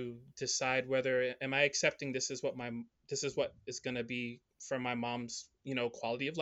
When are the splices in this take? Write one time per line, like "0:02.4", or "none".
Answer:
none

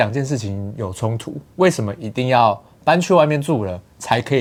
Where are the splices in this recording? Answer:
none

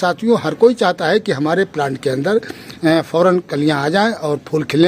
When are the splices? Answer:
none

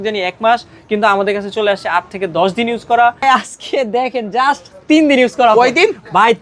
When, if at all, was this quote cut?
0:03.2

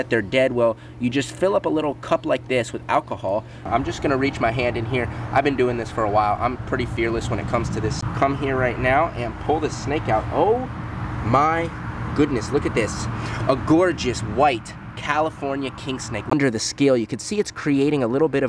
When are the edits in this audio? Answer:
0:03.7
0:08.0
0:16.3

